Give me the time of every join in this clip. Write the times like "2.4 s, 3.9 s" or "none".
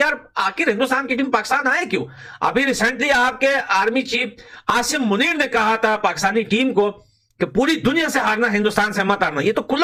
none